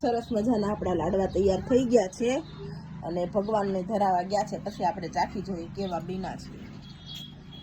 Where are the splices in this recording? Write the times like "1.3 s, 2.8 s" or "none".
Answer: none